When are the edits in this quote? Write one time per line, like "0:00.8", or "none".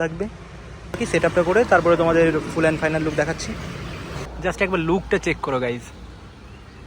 0:01.0
0:04.2

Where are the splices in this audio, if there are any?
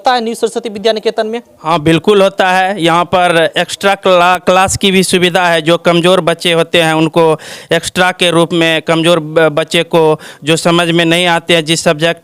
none

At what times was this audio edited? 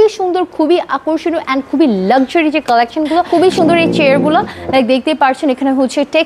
0:03.3

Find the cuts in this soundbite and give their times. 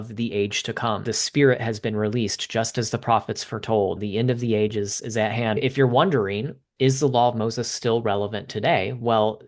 0:01.1
0:04.0
0:05.6
0:06.6

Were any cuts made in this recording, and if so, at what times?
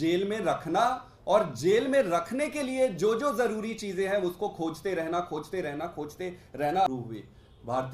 0:06.9

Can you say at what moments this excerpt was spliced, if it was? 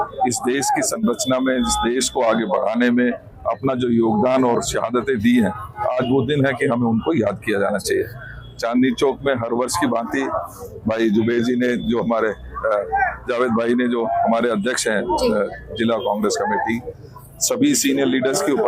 none

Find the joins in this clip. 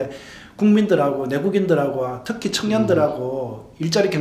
none

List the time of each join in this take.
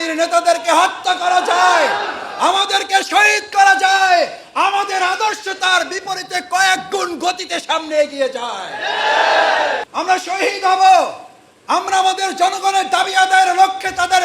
0:09.9

